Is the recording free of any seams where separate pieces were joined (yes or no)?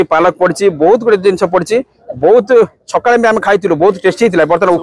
yes